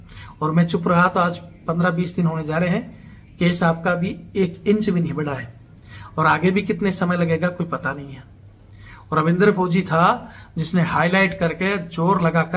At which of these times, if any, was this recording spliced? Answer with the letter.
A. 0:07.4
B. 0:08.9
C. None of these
C